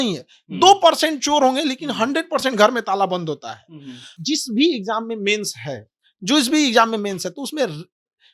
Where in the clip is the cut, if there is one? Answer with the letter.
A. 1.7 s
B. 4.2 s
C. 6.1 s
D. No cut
B